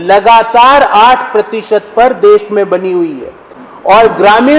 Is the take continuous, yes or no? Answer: yes